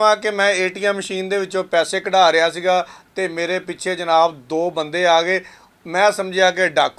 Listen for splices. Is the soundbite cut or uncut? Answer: uncut